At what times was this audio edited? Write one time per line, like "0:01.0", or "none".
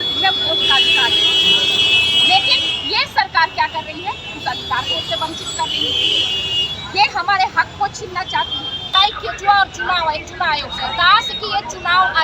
0:08.9